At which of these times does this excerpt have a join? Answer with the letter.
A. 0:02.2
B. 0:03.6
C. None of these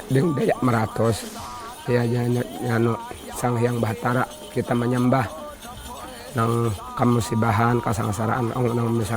C